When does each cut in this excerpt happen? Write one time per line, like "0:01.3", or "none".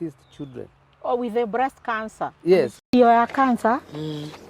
none